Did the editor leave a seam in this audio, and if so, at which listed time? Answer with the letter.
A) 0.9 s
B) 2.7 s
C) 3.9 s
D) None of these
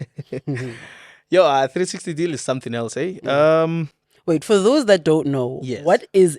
D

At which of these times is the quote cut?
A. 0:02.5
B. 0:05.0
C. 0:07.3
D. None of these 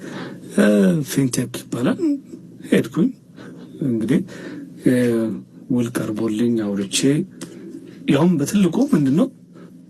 D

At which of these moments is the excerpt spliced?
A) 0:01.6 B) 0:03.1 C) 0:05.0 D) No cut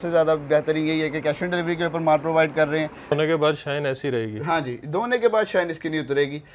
B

